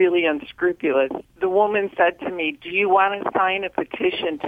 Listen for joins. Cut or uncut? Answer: cut